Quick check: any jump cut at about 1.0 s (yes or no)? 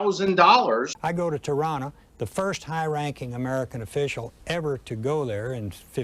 yes